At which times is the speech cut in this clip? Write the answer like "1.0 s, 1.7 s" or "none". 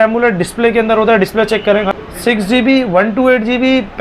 1.9 s